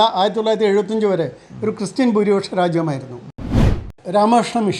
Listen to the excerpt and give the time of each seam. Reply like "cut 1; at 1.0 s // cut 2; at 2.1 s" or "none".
cut 1; at 3.6 s